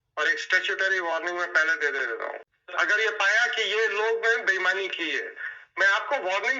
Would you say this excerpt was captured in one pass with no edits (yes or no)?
no